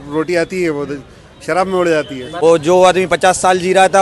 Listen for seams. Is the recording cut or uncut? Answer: cut